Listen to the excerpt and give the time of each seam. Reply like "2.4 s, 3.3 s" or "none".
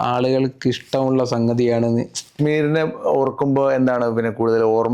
2.3 s